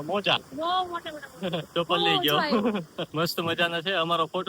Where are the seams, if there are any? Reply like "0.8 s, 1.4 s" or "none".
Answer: 1.7 s